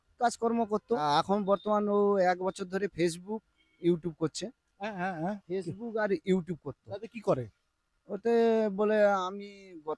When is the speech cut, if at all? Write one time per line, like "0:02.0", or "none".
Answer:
0:01.0